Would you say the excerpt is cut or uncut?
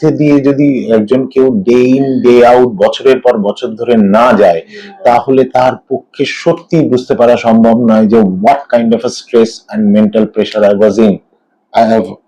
uncut